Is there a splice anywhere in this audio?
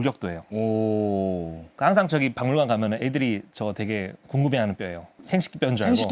yes; 1 cut; at 1.7 s

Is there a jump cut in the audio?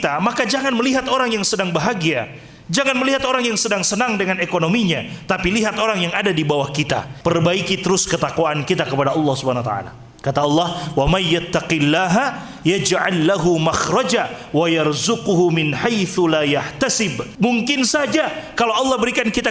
yes; 2 cuts; at 7.1 s, 17.2 s

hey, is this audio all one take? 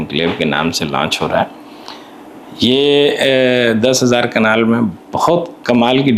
yes; 0 cuts

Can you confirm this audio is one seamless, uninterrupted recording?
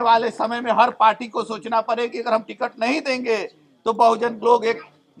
yes; 0 cuts

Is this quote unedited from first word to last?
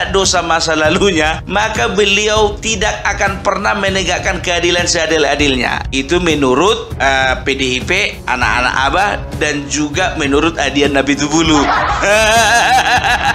no; 1 cut; at 8.1 s

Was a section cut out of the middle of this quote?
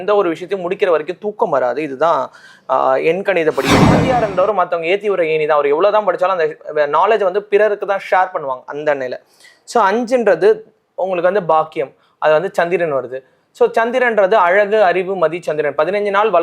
yes; 1 cut; at 4.0 s

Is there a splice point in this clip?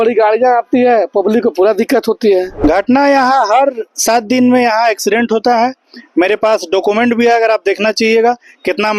yes; 1 cut; at 2.5 s

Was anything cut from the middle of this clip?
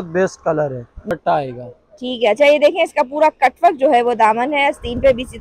yes; 1 cut; at 1.1 s

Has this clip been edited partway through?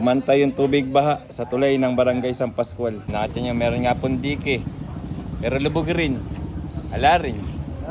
yes; 1 cut; at 3.0 s

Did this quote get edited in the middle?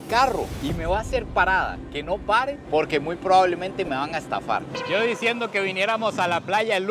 yes; 1 cut; at 4.8 s

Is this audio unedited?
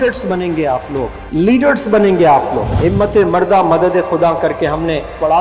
no; 2 cuts; at 1.2 s, 2.7 s

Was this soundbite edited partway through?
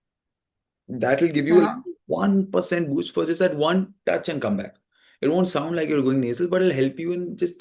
no; 0 cuts

